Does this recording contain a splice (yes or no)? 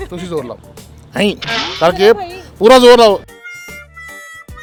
no